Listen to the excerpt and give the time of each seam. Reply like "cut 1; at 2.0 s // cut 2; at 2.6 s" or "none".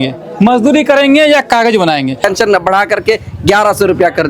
cut 1; at 2.2 s